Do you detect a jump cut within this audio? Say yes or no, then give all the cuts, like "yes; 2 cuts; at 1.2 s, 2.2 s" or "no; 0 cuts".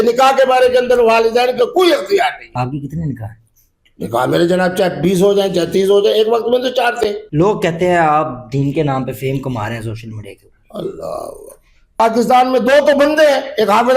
yes; 3 cuts; at 2.5 s, 7.2 s, 12.0 s